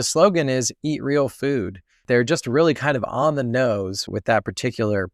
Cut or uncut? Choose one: cut